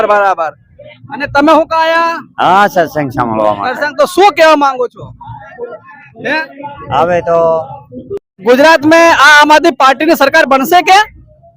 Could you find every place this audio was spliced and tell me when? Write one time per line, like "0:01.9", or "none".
0:08.4